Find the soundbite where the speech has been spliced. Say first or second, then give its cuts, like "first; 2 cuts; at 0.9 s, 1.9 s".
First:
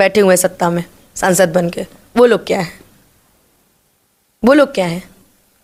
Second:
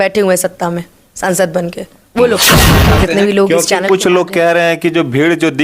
second; 1 cut; at 2.9 s